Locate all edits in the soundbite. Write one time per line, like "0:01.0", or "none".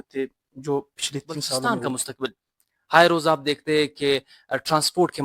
0:01.6